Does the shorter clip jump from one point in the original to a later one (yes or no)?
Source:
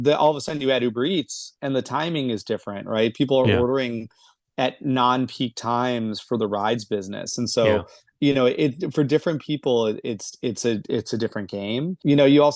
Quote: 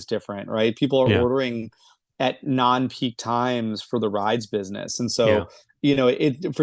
no